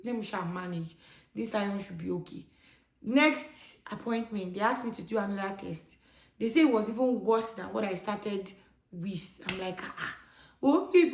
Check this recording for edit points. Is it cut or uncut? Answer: uncut